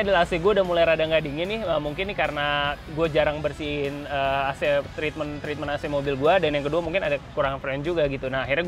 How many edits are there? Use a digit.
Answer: 0